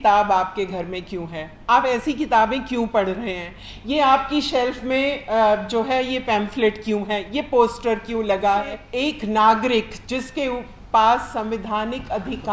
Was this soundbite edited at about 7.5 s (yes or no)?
no